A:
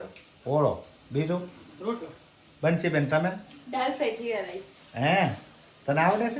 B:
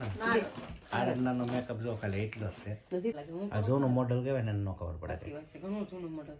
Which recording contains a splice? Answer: B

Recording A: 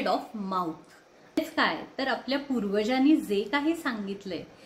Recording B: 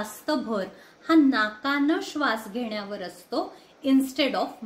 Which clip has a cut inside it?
A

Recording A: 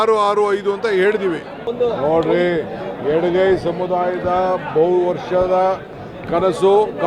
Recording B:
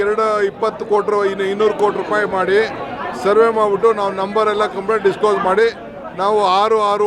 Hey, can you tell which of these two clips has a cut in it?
A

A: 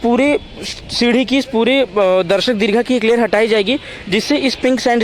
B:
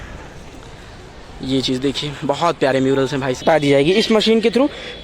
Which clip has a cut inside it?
B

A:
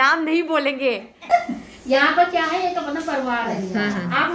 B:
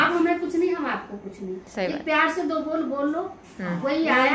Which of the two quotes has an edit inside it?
A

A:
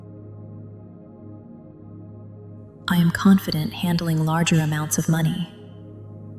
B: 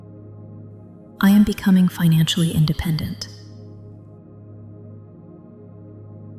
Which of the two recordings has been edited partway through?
A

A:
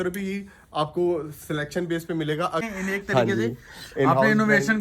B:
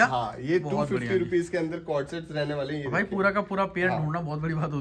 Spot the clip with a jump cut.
A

